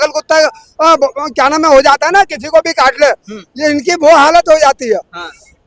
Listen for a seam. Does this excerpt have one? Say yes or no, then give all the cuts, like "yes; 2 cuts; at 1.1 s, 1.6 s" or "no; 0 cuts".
no; 0 cuts